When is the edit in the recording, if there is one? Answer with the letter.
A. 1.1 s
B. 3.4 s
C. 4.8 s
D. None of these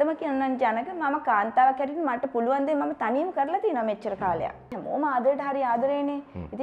C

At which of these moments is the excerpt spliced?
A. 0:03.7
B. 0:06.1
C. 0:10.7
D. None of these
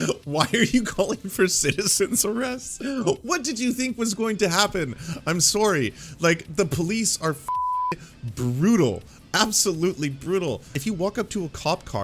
C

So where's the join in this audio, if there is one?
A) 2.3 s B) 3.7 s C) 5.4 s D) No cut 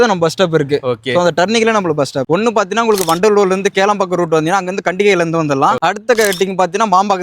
A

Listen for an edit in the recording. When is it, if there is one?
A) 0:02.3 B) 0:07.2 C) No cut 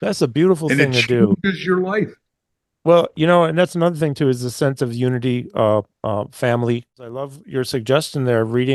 B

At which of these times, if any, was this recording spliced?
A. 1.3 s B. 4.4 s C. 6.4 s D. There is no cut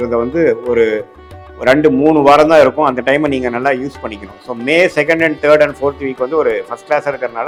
D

